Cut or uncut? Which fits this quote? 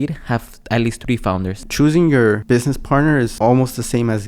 cut